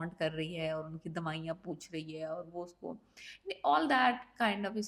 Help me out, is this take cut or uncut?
uncut